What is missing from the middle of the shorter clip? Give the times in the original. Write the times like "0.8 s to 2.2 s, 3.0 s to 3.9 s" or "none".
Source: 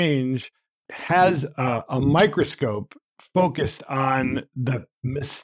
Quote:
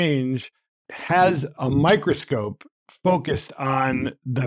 1.5 s to 1.8 s